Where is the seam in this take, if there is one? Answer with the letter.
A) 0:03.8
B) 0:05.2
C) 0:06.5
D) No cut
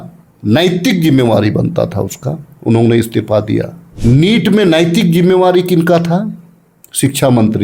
A